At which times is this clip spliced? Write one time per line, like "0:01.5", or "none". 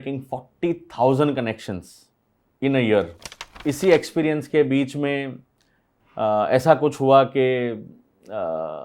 0:03.6